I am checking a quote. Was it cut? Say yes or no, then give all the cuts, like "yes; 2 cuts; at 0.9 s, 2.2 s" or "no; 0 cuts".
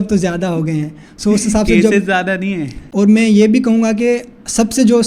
yes; 1 cut; at 2.8 s